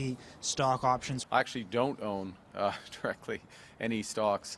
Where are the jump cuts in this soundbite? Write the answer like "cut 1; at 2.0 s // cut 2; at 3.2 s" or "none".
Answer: cut 1; at 1.1 s